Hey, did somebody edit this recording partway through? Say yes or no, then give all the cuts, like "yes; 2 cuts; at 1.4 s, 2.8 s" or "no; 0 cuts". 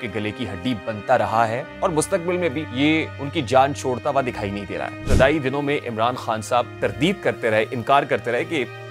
yes; 4 cuts; at 1.7 s, 3.0 s, 5.0 s, 6.7 s